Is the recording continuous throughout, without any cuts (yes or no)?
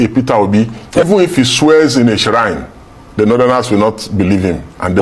no